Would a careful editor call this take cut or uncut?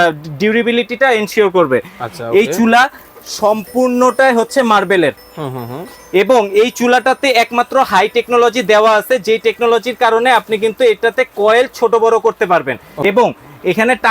cut